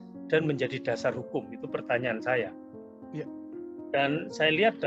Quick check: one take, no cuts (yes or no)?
yes